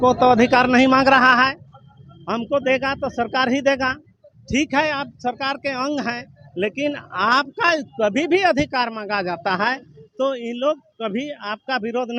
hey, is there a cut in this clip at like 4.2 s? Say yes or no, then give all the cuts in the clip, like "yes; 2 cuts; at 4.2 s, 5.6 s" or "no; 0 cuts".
no; 0 cuts